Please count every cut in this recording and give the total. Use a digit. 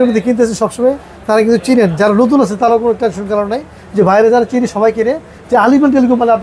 0